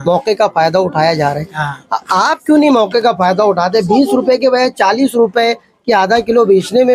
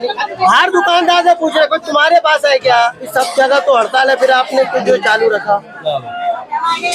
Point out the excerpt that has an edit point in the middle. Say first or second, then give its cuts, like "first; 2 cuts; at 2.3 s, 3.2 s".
second; 1 cut; at 3.1 s